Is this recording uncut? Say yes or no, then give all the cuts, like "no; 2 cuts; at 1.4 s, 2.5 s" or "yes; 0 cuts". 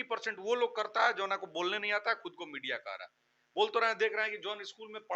yes; 0 cuts